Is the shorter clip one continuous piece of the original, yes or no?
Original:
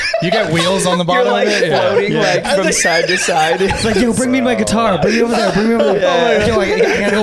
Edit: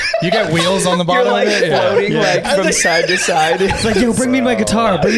yes